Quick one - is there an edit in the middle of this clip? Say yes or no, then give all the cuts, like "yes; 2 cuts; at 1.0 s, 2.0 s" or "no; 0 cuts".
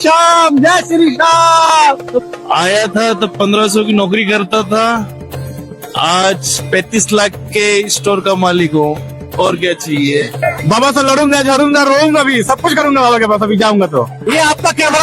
yes; 3 cuts; at 2.2 s, 10.3 s, 14.2 s